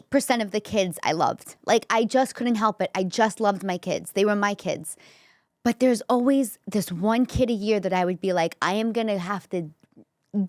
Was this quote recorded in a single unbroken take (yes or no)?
yes